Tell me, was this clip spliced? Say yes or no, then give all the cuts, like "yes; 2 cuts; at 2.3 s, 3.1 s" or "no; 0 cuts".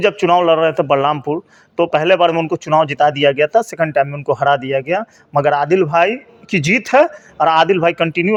no; 0 cuts